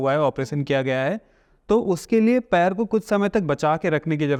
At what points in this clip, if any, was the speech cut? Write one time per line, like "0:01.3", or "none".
none